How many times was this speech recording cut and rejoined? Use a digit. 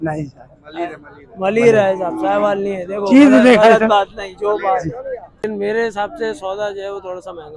1